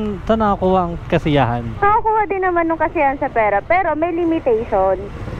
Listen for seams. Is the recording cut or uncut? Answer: cut